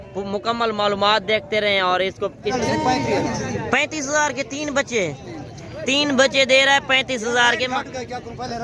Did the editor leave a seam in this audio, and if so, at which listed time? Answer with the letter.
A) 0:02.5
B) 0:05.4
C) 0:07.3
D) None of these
A